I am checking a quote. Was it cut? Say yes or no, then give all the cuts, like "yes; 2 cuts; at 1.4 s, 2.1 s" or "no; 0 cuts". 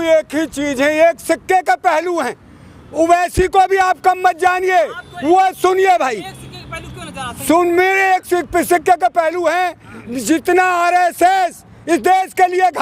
no; 0 cuts